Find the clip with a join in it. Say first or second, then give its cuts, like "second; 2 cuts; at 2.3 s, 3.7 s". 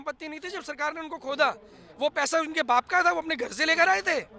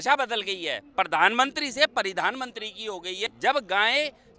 second; 1 cut; at 3.2 s